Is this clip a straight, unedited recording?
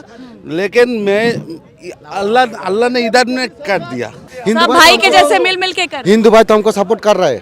no; 1 cut; at 4.3 s

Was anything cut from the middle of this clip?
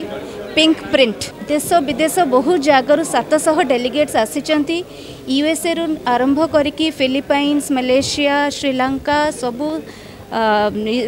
yes; 1 cut; at 1.3 s

